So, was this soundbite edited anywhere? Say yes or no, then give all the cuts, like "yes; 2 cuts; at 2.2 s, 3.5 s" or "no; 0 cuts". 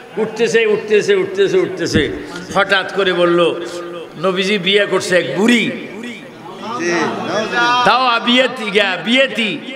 no; 0 cuts